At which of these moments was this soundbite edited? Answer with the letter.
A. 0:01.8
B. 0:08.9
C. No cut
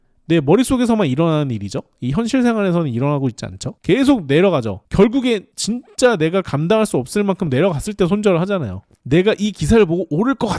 B